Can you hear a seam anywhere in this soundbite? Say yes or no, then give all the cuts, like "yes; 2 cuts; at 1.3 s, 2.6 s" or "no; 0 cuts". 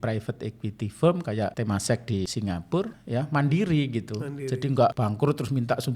yes; 3 cuts; at 1.5 s, 2.9 s, 5.0 s